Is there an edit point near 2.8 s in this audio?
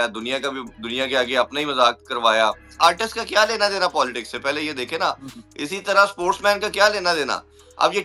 yes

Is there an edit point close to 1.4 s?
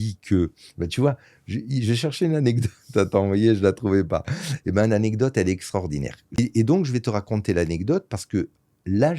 no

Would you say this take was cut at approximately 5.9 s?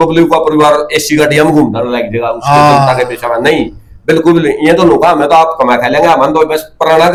no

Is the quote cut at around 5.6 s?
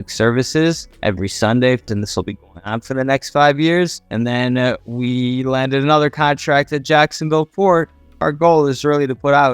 no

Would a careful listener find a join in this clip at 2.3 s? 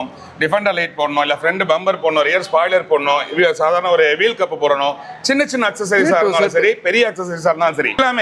no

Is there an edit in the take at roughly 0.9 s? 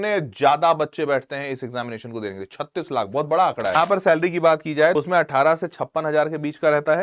no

